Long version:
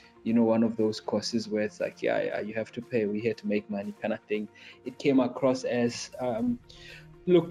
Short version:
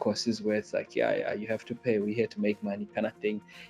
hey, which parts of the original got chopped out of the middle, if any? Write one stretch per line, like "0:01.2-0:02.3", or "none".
none

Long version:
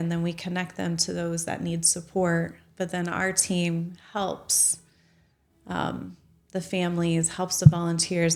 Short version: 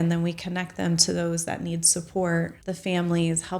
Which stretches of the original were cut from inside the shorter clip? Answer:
0:02.6-0:06.4

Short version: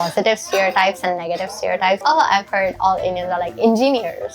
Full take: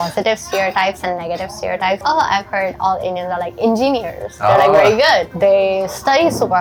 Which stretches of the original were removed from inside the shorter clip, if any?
none

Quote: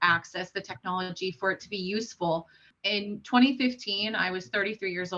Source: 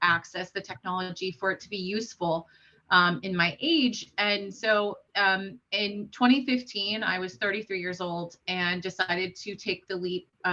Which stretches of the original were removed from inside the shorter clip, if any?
0:02.7-0:05.6

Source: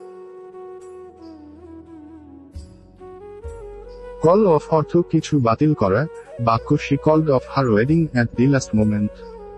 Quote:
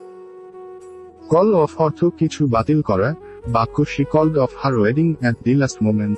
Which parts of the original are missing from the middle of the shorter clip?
0:01.3-0:04.2

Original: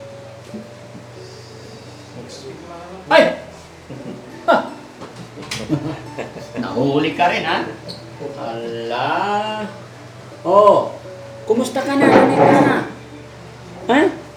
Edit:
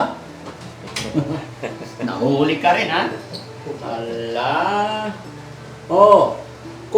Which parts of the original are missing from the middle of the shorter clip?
none

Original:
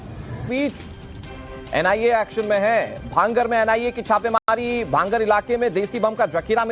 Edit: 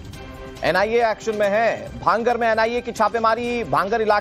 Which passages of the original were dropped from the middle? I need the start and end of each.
0:04.4-0:04.5

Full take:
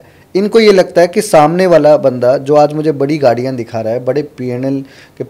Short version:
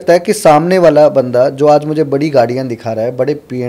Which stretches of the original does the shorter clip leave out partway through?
none

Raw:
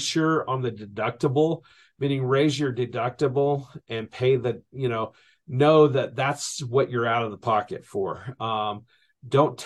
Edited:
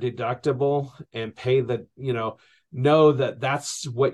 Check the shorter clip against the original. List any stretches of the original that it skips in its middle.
none

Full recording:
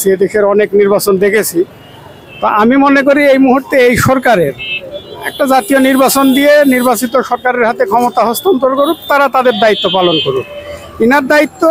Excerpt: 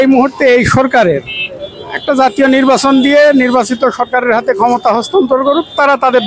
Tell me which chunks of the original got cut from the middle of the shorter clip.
none

